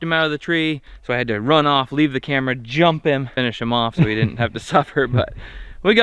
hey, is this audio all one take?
no; 2 cuts; at 0.9 s, 3.3 s

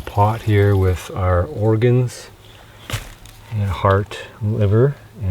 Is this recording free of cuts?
yes; 0 cuts

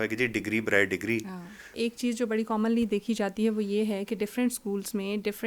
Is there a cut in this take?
yes; 1 cut; at 1.7 s

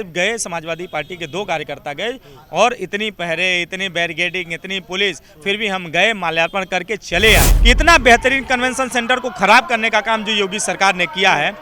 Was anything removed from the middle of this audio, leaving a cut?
yes; 1 cut; at 7.5 s

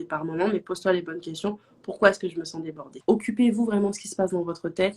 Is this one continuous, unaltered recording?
no; 1 cut; at 2.9 s

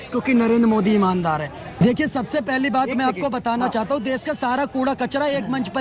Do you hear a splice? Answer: no; 0 cuts

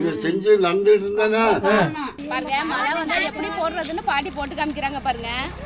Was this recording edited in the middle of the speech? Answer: yes; 1 cut; at 2.1 s

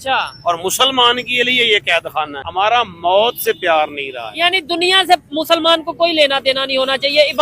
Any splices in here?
yes; 1 cut; at 2.4 s

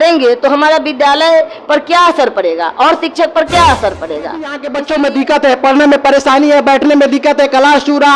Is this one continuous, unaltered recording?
no; 1 cut; at 4.7 s

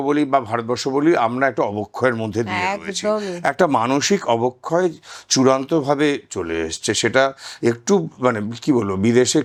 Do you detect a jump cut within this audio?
no; 0 cuts

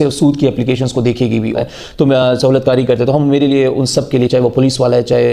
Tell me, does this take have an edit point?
yes; 1 cut; at 1.5 s

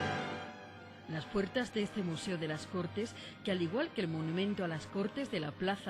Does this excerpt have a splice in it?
yes; 1 cut; at 3.9 s

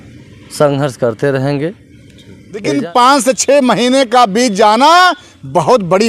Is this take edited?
yes; 1 cut; at 2.6 s

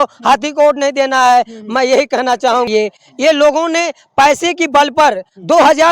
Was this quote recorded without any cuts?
no; 1 cut; at 2.7 s

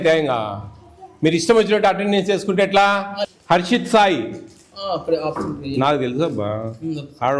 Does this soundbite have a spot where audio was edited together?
yes; 1 cut; at 3.2 s

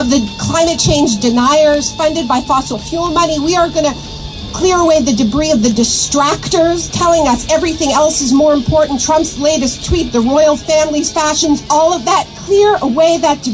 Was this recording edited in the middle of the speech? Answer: no; 0 cuts

